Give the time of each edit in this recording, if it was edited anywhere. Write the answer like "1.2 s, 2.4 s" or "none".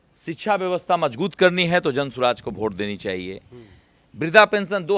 none